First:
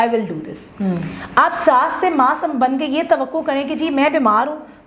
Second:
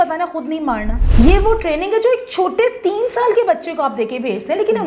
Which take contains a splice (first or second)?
second